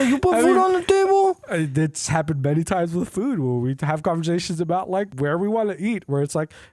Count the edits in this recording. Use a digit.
1